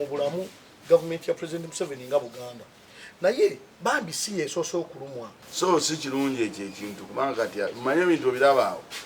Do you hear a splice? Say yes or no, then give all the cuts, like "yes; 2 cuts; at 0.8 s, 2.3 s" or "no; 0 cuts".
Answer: yes; 1 cut; at 5.4 s